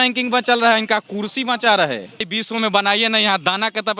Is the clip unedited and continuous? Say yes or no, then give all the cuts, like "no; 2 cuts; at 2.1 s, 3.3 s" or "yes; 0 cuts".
no; 1 cut; at 2.3 s